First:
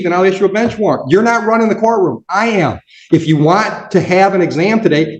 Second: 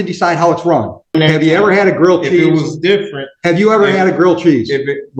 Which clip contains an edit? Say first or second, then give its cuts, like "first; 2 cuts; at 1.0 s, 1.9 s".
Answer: second; 1 cut; at 1.1 s